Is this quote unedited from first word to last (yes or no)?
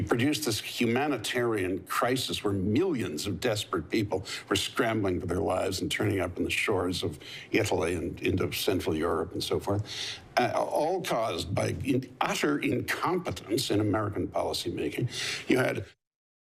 yes